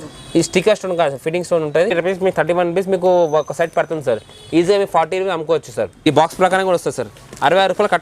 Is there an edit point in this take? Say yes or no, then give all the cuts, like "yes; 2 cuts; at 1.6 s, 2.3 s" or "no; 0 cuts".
yes; 2 cuts; at 1.9 s, 6.0 s